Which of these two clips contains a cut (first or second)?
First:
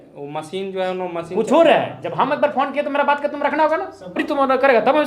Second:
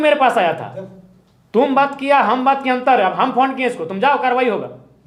first